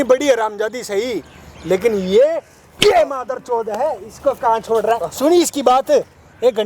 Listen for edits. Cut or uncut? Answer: uncut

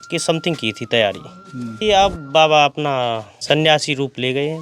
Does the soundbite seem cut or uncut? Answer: cut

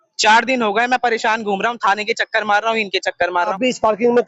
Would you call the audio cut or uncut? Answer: cut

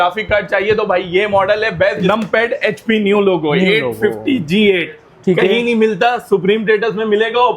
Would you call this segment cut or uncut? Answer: cut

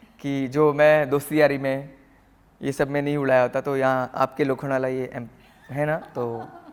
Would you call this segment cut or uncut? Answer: uncut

